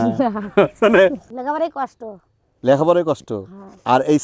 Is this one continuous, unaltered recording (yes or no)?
no